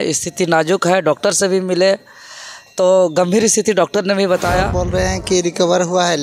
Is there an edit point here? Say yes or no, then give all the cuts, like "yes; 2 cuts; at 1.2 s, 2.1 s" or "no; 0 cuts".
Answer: yes; 1 cut; at 4.8 s